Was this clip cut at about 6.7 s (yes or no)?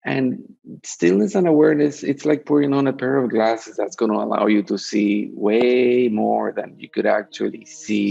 no